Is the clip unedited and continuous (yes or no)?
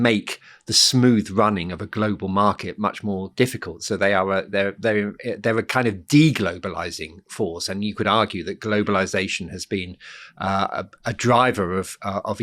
yes